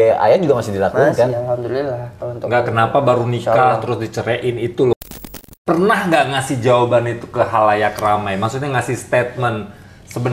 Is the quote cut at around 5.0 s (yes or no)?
yes